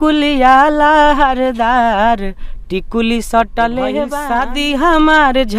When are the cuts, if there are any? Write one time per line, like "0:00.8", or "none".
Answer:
0:04.2